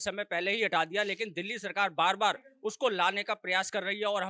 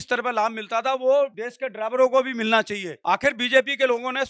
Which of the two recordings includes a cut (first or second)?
second